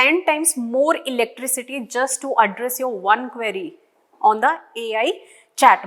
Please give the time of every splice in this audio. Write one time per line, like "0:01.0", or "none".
none